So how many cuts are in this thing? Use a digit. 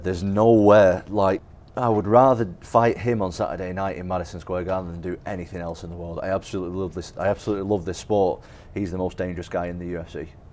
2